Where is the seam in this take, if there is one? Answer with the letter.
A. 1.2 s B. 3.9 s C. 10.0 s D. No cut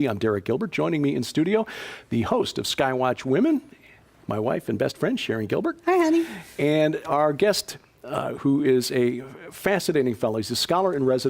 A